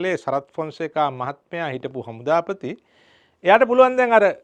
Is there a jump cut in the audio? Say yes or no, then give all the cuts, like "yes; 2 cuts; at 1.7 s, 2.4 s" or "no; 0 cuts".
no; 0 cuts